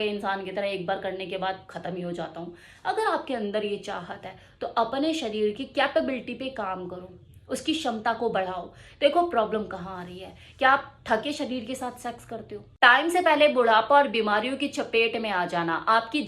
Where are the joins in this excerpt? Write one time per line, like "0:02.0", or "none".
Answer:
0:12.6